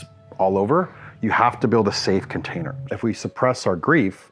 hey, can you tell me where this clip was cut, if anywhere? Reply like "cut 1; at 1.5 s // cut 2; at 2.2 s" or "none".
cut 1; at 2.8 s